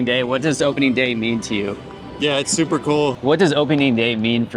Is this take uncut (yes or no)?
no